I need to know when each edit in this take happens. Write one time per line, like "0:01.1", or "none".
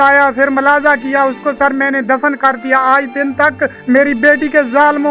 0:03.8